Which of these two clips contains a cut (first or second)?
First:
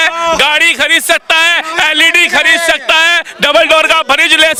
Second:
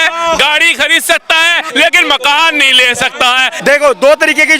second